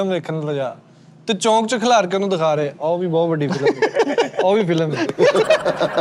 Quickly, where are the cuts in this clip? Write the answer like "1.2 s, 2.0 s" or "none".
none

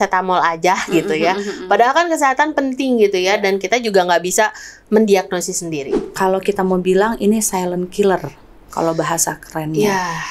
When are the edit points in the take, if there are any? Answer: 6.1 s

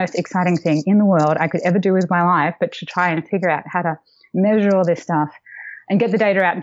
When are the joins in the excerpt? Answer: none

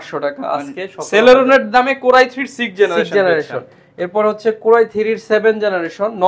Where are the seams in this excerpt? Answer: none

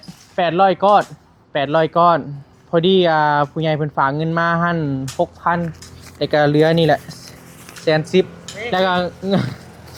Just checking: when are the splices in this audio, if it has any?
none

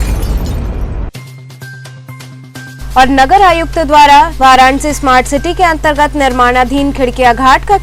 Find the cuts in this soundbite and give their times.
2.8 s

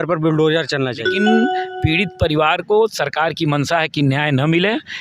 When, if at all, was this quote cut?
1.1 s

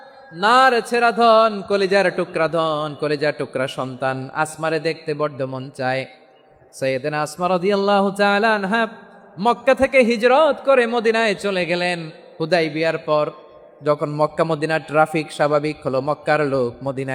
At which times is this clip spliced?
none

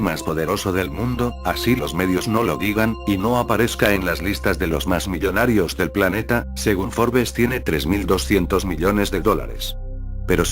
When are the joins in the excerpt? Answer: none

